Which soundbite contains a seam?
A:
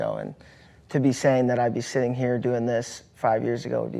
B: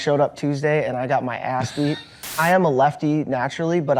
B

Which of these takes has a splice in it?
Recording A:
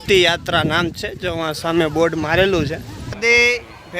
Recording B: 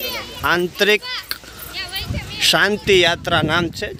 A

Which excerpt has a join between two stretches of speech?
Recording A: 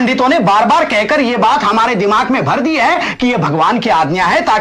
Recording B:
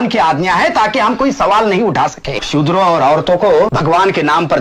B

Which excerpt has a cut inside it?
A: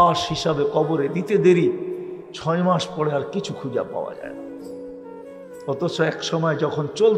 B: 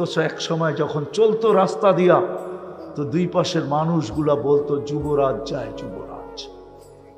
B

